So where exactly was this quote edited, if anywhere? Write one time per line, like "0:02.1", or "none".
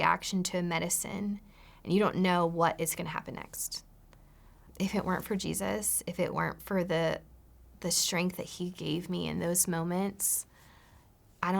0:04.6

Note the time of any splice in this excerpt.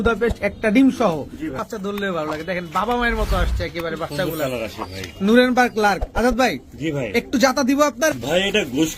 0:01.5
0:08.1

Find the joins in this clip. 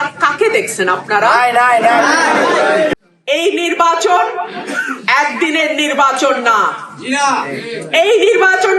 0:02.9

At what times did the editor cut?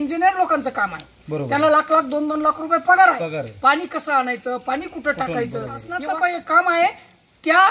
0:05.9

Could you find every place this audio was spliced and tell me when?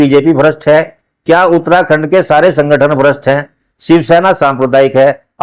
0:03.7

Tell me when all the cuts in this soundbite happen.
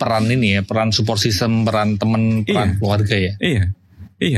none

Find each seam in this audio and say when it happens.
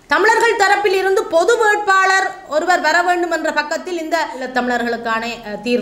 0:04.5

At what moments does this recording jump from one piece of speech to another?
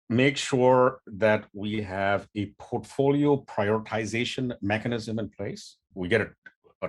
0:05.9

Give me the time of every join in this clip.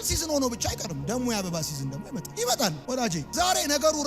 0:02.8

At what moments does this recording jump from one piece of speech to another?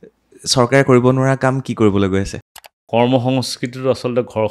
0:02.4

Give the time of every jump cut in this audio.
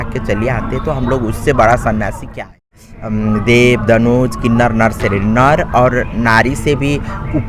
0:02.8

